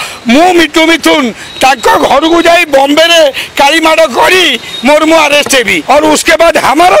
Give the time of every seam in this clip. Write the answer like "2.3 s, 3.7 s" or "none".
5.8 s

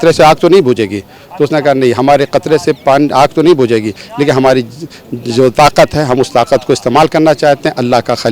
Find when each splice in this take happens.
none

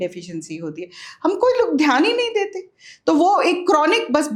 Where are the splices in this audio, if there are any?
none

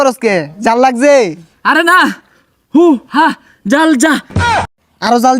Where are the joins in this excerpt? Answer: 4.5 s

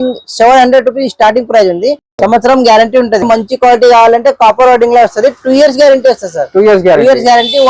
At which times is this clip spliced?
3.2 s

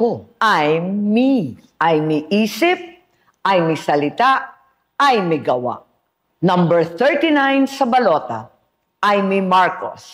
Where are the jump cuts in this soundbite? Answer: 9.1 s

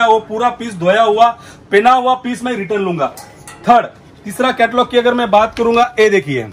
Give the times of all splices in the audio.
none

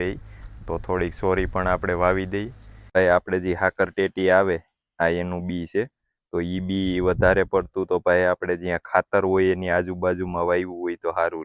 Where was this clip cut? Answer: 3.0 s

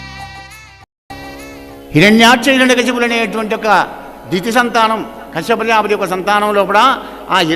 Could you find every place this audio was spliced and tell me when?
1.1 s

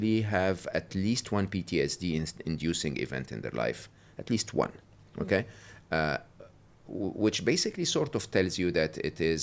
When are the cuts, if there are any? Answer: none

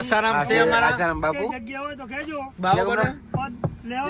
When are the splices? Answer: none

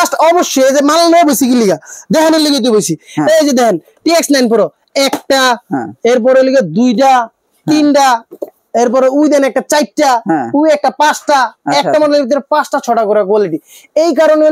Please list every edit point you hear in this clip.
none

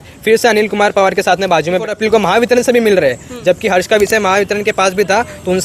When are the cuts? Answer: 1.9 s

